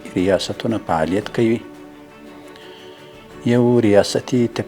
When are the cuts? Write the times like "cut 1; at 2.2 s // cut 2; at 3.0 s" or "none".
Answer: none